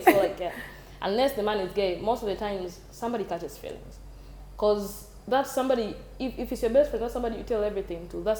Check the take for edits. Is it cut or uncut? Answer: uncut